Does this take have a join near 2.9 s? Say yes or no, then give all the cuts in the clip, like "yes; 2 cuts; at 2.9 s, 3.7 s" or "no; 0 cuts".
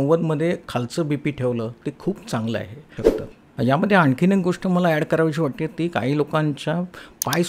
yes; 1 cut; at 2.9 s